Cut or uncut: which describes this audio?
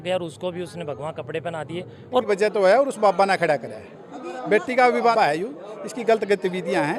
cut